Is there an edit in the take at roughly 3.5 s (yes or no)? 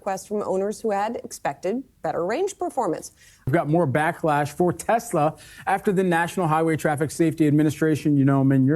yes